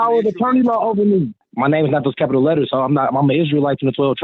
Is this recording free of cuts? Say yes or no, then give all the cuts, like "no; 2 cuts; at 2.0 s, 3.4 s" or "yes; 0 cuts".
no; 1 cut; at 1.4 s